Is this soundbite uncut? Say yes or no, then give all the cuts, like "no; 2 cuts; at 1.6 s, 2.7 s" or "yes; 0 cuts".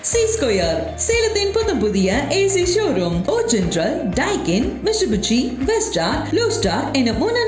yes; 0 cuts